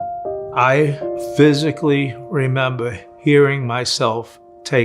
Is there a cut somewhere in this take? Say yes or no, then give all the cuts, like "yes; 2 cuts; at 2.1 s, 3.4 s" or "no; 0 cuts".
yes; 1 cut; at 1.2 s